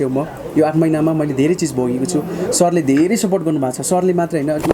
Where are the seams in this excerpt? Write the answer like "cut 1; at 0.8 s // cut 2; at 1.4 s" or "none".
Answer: none